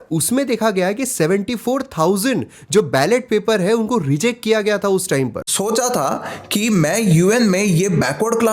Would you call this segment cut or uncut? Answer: cut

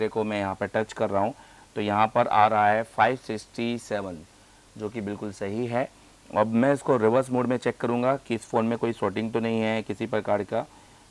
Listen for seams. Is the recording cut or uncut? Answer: uncut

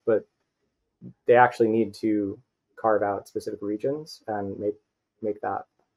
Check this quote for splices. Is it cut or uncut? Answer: uncut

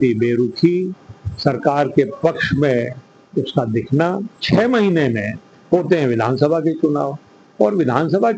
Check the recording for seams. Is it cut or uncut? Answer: cut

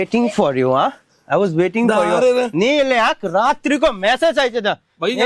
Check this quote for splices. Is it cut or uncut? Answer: uncut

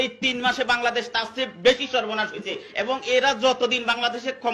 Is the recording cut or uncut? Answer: uncut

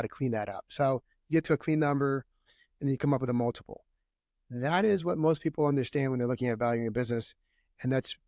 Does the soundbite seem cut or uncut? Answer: uncut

